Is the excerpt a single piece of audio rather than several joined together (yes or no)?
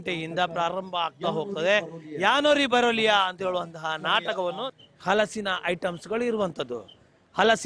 no